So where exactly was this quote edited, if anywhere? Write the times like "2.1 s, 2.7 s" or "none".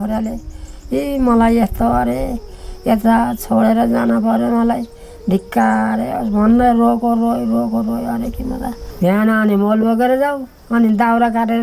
8.8 s